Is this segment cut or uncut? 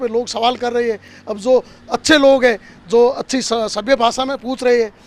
uncut